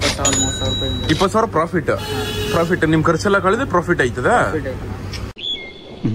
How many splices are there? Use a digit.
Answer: 0